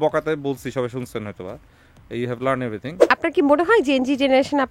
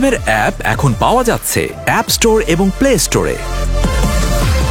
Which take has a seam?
first; 1 cut; at 2.9 s

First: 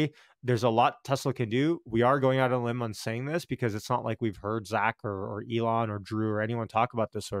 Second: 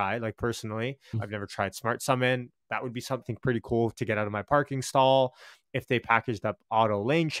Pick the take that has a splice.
second; 2 cuts; at 1.2 s, 3.2 s

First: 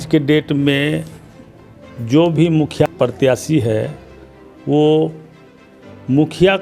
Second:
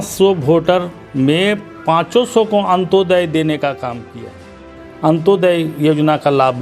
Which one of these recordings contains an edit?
first; 1 cut; at 2.9 s

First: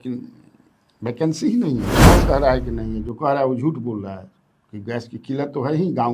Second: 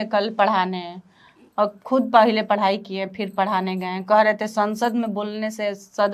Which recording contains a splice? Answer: first; 1 cut; at 2.0 s

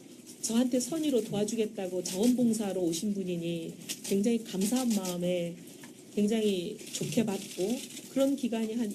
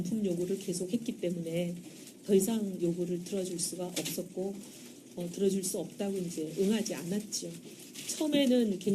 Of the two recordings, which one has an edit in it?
second; 1 cut; at 2.6 s

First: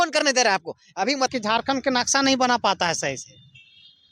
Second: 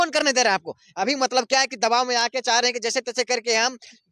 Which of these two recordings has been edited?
first; 1 cut; at 1.3 s

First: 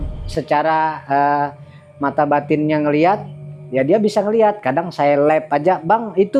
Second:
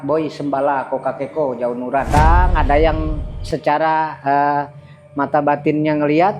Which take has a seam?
second; 1 cut; at 2.1 s

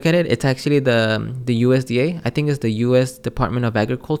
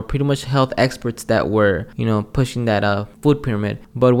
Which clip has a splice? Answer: second; 2 cuts; at 1.9 s, 3.5 s

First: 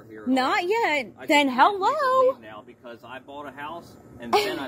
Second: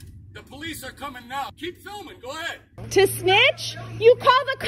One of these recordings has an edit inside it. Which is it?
second; 1 cut; at 2.8 s

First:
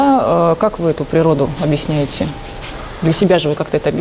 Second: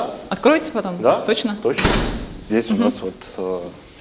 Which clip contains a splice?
second; 1 cut; at 2.4 s

